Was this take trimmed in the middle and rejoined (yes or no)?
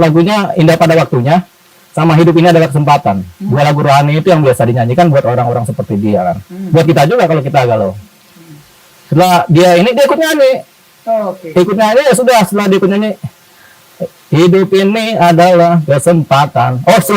no